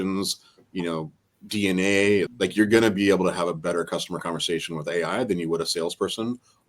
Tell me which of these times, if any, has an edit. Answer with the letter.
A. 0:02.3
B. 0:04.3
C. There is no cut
A